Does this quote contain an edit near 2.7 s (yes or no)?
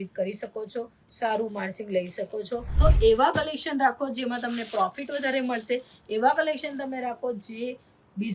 yes